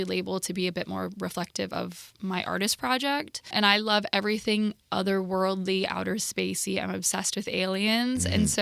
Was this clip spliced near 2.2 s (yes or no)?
no